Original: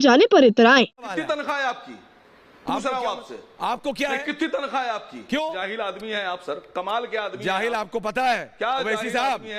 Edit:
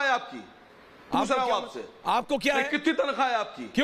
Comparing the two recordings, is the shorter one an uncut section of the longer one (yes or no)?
yes